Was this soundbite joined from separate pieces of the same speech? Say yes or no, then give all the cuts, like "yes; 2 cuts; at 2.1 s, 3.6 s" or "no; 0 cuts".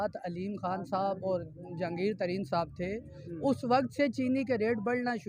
no; 0 cuts